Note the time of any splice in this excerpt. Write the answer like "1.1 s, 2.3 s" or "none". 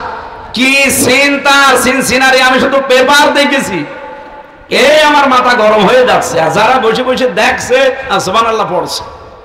none